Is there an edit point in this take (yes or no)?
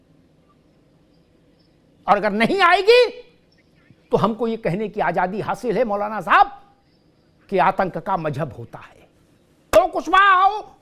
yes